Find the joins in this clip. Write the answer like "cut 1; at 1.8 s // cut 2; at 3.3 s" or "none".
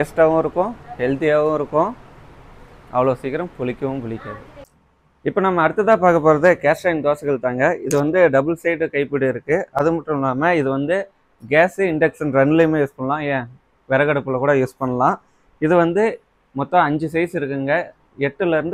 none